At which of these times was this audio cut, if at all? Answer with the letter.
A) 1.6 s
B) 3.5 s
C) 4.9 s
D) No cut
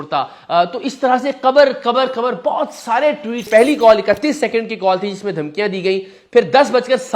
B